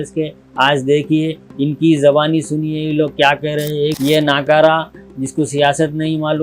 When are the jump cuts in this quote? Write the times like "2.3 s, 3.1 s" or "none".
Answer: 4.0 s